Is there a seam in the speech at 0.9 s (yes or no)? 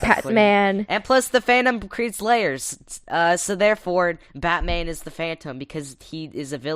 yes